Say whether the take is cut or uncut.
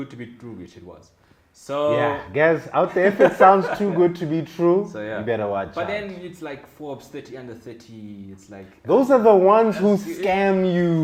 uncut